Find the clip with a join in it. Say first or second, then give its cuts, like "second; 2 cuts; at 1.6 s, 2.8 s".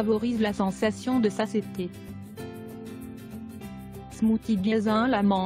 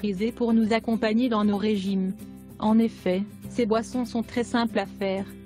first; 1 cut; at 1.8 s